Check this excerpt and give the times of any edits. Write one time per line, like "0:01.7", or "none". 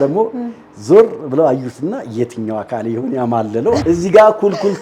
0:03.8

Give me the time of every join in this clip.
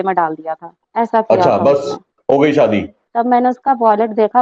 0:03.0

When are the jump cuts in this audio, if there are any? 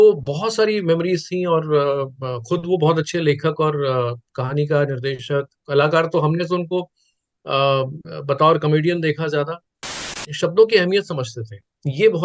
0:10.2

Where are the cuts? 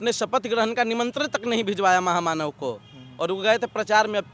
none

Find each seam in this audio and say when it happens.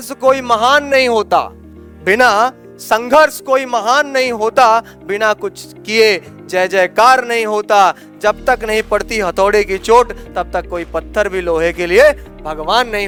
none

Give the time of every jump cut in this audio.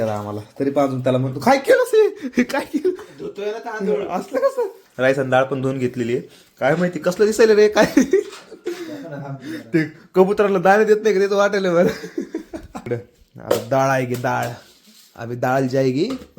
0:04.8
0:12.9

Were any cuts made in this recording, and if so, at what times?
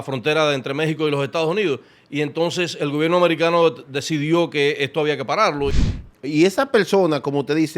0:05.8

